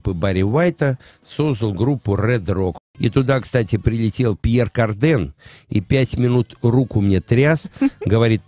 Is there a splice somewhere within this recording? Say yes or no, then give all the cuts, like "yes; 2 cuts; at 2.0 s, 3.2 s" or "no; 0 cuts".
yes; 1 cut; at 2.8 s